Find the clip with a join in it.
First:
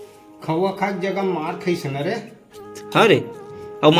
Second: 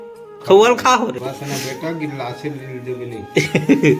second; 1 cut; at 1.2 s

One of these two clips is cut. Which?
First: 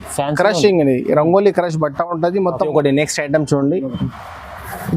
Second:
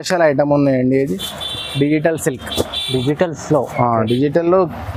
first; 1 cut; at 2.6 s

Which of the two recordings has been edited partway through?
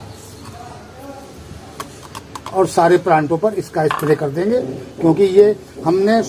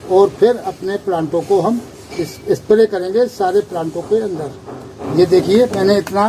second; 1 cut; at 5.0 s

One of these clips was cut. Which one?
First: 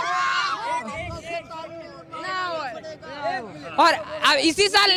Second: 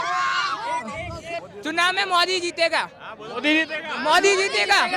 second; 1 cut; at 1.4 s

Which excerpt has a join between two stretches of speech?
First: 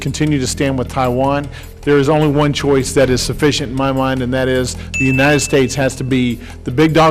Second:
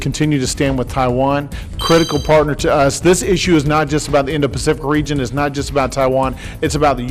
first; 1 cut; at 1.6 s

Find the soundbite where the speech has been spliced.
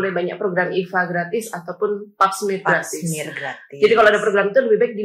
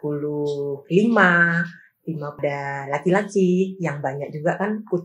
second; 1 cut; at 2.4 s

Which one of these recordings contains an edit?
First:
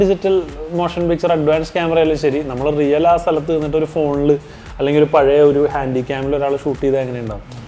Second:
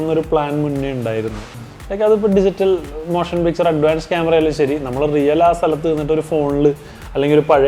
second; 1 cut; at 1.4 s

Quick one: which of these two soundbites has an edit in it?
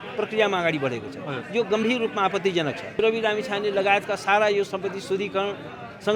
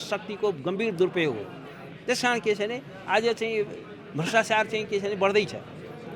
first; 1 cut; at 3.0 s

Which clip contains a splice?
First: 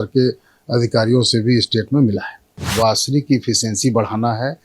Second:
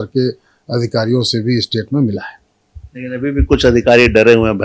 first; 1 cut; at 2.7 s

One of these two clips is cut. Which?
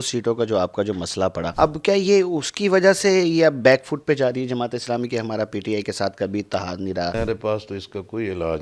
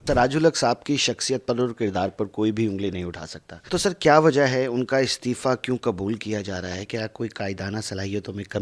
first; 2 cuts; at 1.4 s, 7.1 s

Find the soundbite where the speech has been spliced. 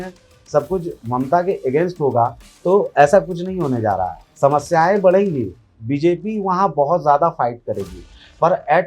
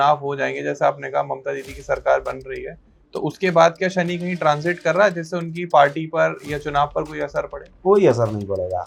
first; 2 cuts; at 1.0 s, 4.2 s

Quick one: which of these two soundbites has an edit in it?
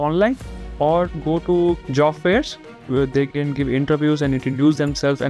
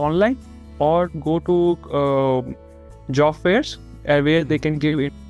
first; 2 cuts; at 1.8 s, 2.7 s

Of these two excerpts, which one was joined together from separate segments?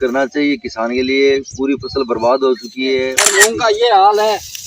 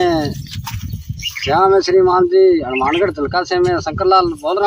first; 1 cut; at 3.2 s

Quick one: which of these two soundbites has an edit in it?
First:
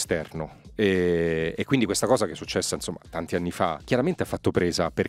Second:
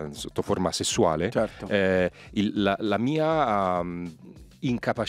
first; 1 cut; at 3.8 s

